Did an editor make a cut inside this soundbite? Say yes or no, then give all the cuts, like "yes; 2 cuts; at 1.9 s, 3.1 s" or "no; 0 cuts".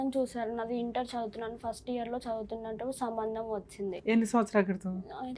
no; 0 cuts